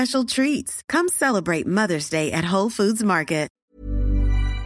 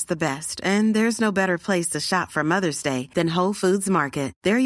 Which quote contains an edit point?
first; 1 cut; at 3.6 s

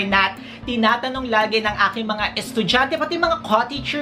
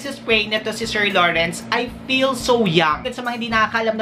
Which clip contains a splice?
second; 1 cut; at 3.1 s

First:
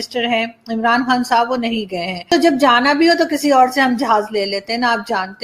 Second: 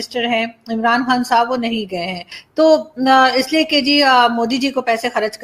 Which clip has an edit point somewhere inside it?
first; 1 cut; at 2.3 s

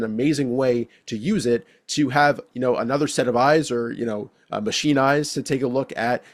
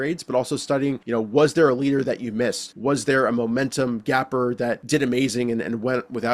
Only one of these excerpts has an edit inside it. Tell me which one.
second; 3 cuts; at 1.0 s, 2.7 s, 4.8 s

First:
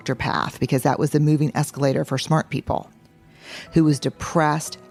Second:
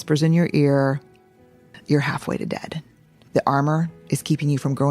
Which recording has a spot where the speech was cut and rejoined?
second; 2 cuts; at 1.7 s, 3.2 s

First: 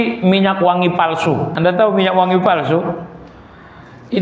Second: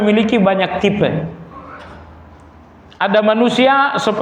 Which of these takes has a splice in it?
first; 1 cut; at 1.5 s

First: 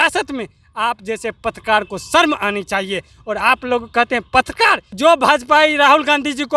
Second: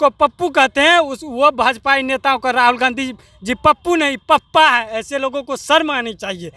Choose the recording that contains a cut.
first; 1 cut; at 4.9 s

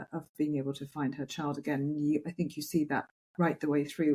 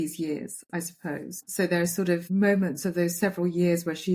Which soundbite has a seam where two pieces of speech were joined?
second; 2 cuts; at 1.6 s, 2.2 s

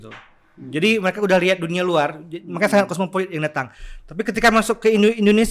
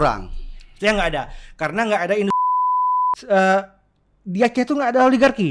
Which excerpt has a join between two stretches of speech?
second; 1 cut; at 2.6 s

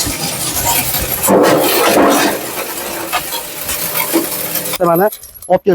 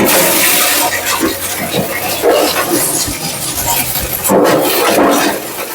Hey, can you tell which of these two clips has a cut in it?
first; 1 cut; at 4.8 s

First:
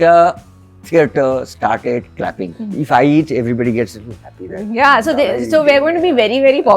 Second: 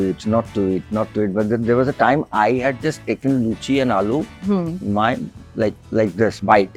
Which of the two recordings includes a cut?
first; 1 cut; at 2.5 s

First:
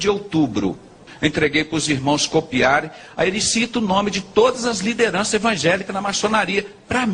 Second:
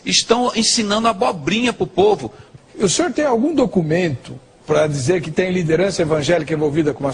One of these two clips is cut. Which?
first; 1 cut; at 1.1 s

